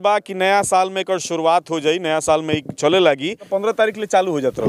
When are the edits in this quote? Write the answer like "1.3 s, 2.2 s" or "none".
3.4 s